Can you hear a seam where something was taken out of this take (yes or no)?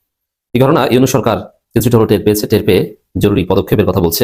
no